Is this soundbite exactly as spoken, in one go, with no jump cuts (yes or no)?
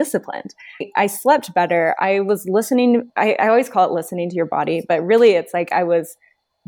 yes